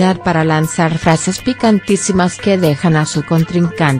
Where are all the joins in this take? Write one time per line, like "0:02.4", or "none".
none